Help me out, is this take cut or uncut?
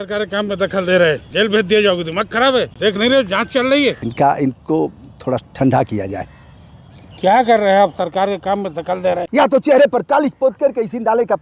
cut